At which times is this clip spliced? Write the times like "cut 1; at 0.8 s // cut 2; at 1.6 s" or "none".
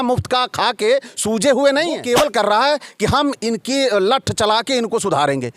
cut 1; at 2.0 s